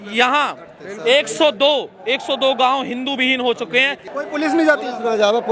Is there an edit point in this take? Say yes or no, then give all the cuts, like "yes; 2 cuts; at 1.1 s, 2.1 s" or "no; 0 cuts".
yes; 1 cut; at 4.1 s